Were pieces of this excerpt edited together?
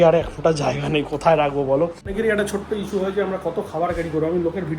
yes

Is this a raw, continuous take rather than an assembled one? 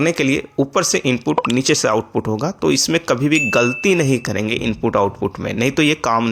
yes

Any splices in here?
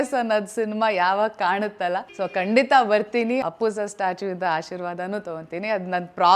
yes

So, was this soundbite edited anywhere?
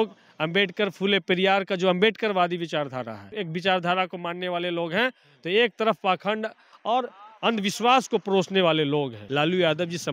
yes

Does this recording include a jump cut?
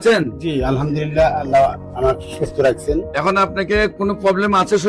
no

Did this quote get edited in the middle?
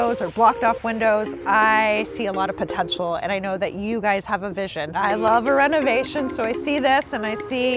yes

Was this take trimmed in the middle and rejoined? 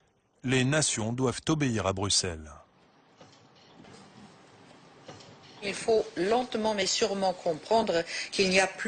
yes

